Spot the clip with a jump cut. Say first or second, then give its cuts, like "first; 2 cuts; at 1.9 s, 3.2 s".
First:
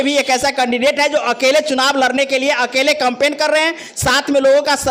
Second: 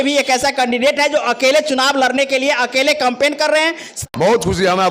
second; 1 cut; at 3.9 s